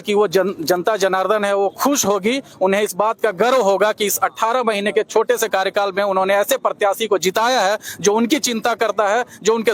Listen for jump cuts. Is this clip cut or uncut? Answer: uncut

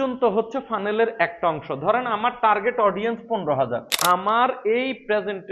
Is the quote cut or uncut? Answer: cut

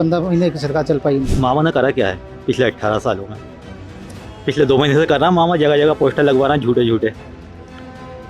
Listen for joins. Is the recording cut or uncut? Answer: cut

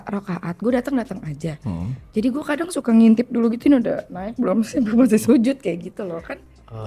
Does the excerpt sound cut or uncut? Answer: uncut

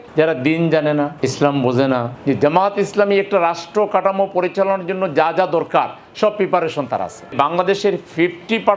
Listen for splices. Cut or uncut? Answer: cut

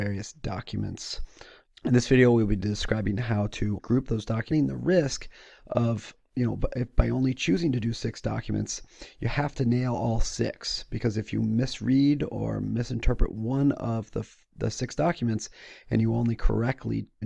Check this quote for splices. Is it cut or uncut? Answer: uncut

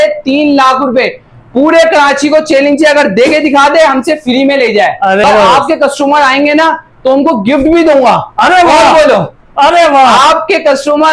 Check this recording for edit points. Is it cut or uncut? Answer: cut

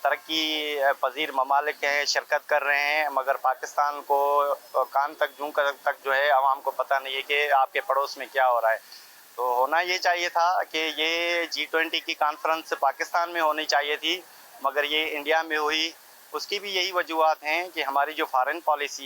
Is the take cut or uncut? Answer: uncut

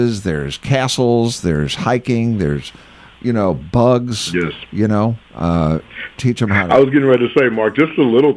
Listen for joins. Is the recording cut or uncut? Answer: uncut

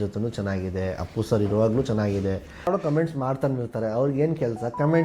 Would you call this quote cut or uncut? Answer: cut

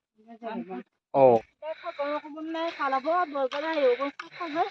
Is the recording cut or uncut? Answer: cut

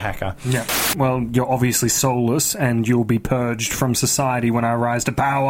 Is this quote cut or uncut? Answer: cut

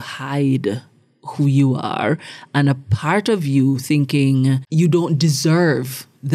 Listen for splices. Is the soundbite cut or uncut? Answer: uncut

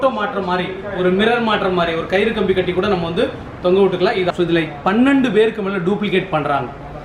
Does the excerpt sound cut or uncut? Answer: cut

